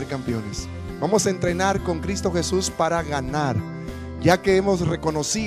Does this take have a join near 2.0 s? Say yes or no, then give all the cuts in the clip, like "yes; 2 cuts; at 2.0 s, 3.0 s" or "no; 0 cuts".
yes; 1 cut; at 2.0 s